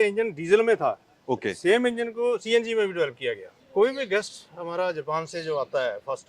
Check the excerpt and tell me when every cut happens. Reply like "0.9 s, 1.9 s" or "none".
3.5 s